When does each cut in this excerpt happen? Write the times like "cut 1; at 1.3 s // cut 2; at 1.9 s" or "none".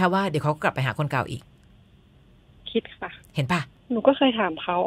cut 1; at 3.7 s